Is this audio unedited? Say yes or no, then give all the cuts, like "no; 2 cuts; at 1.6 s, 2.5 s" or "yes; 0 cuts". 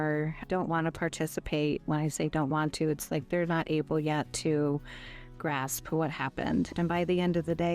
no; 1 cut; at 6.7 s